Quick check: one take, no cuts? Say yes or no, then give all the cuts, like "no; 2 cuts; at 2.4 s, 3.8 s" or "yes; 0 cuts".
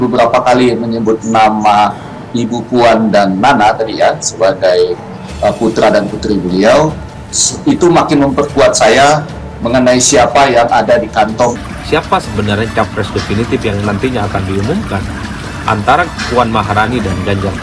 no; 1 cut; at 11.7 s